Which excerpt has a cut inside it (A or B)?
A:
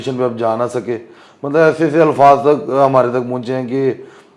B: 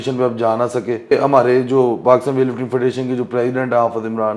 B